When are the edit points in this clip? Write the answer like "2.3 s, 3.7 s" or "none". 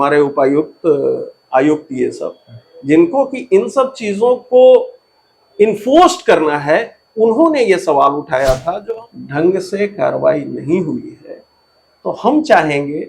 8.9 s